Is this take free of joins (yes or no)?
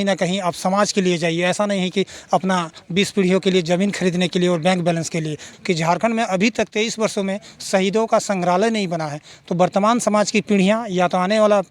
no